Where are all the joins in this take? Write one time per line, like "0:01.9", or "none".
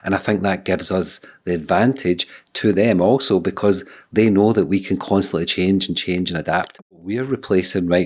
0:06.7

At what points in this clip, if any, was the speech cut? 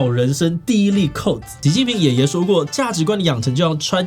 0:01.6

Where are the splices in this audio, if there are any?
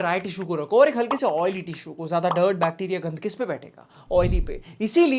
none

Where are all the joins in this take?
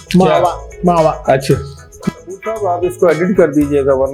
0:02.0

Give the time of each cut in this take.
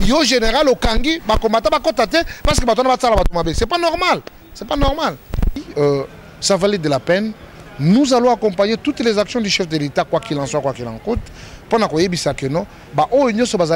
0:05.6

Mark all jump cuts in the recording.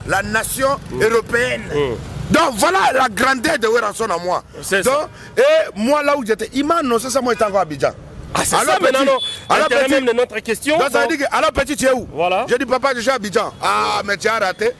none

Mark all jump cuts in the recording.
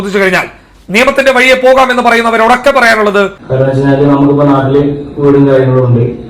0:03.4

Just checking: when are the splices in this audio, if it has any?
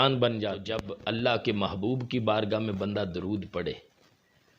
0:00.9

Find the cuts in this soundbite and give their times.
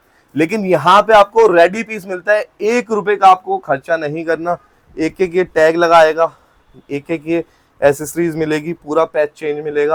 none

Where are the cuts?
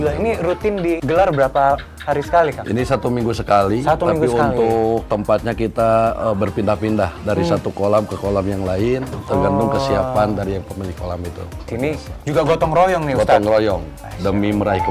0:01.0
0:11.6
0:13.9

